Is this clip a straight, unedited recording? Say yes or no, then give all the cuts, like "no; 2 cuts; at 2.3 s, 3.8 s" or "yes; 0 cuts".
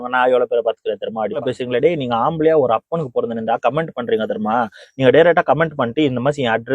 no; 1 cut; at 1.4 s